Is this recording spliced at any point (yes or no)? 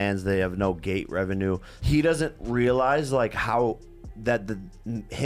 yes